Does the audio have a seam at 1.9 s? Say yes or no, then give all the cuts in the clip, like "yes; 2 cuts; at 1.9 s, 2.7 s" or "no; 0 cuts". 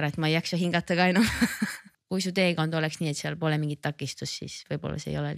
yes; 1 cut; at 1.9 s